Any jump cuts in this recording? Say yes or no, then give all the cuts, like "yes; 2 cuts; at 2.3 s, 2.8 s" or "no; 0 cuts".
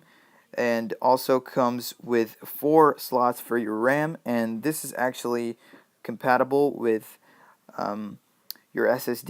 yes; 1 cut; at 5.7 s